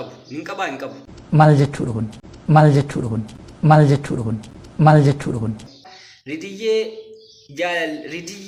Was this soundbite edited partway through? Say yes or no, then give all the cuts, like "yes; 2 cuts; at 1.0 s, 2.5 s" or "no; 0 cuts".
no; 0 cuts